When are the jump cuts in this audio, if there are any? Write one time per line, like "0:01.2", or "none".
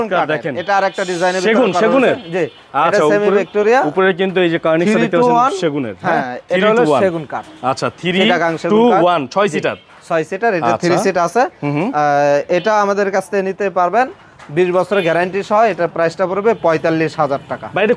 none